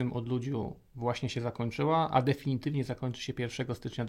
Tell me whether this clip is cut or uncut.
uncut